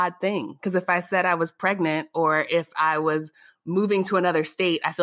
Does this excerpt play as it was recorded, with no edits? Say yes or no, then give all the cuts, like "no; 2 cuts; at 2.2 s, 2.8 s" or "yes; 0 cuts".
yes; 0 cuts